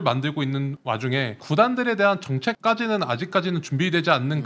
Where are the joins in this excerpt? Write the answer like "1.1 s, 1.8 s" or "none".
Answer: none